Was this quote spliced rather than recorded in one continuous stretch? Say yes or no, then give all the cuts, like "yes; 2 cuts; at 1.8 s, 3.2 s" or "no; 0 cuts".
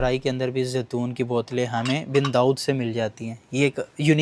no; 0 cuts